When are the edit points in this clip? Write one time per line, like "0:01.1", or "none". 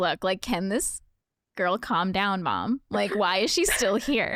none